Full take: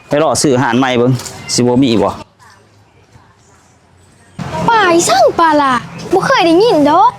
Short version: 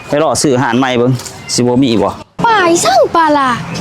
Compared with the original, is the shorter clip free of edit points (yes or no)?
no